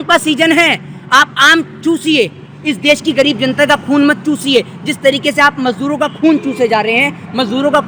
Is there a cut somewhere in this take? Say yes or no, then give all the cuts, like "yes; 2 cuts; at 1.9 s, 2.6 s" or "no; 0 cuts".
no; 0 cuts